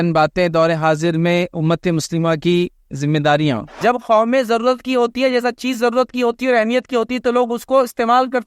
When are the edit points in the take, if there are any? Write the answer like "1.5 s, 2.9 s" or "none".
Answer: 3.7 s